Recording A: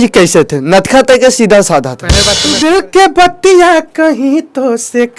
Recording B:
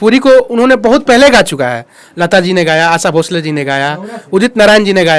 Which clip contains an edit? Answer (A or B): A